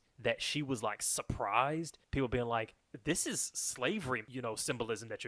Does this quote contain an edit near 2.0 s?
yes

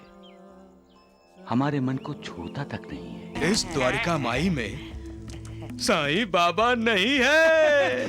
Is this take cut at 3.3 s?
yes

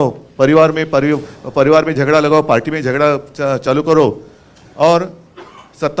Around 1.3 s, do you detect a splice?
no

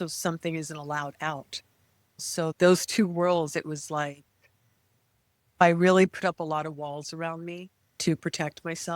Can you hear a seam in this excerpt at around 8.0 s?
no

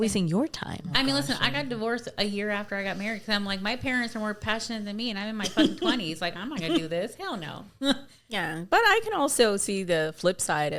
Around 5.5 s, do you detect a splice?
no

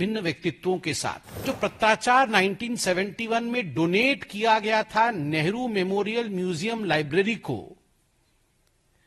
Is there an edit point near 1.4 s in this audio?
yes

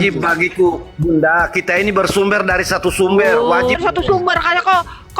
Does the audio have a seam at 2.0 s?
no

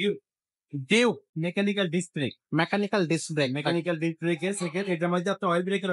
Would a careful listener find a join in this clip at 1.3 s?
yes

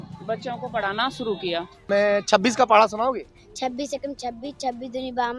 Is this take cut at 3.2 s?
no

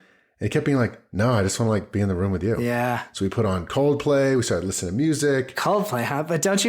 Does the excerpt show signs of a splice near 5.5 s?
yes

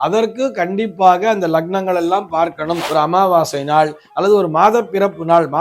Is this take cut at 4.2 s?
no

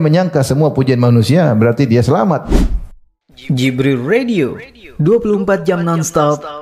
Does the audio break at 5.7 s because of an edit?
no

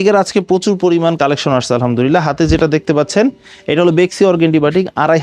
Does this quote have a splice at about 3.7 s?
no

